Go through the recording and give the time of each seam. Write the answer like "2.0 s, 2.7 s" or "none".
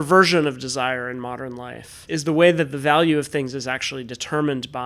2.0 s